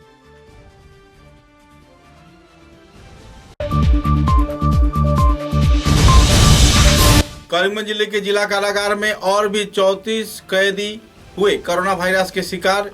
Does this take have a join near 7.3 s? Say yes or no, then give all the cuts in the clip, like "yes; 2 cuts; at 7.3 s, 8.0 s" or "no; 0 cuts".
yes; 1 cut; at 7.3 s